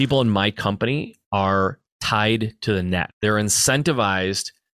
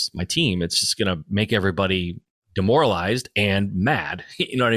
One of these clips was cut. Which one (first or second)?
first